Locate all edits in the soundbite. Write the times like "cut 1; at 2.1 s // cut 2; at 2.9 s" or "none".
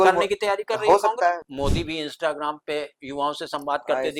cut 1; at 1.4 s